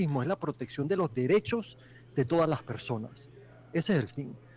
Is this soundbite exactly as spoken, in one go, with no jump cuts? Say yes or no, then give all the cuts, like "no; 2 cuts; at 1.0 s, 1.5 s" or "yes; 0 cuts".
yes; 0 cuts